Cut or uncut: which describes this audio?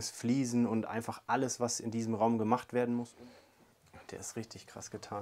cut